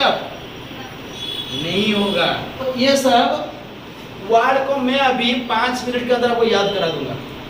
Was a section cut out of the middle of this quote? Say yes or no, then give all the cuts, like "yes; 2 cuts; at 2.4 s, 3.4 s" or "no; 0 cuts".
yes; 1 cut; at 2.6 s